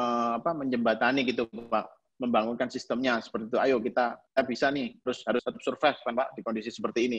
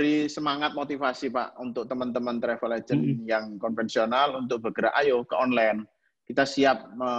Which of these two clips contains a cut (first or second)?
first